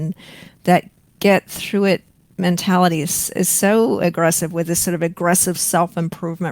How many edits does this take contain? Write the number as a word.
zero